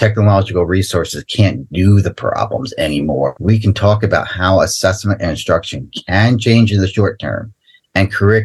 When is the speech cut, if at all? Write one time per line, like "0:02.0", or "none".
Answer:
0:03.4

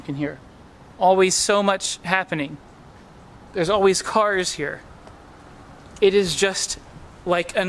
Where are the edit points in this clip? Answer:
none

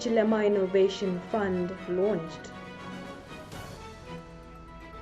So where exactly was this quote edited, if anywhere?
0:02.3
0:03.8

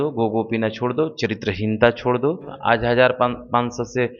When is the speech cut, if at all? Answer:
0:02.5

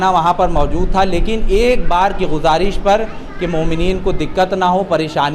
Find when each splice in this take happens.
none

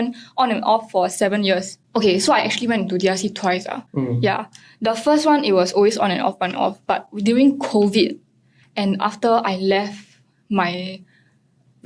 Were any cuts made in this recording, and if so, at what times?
0:01.8

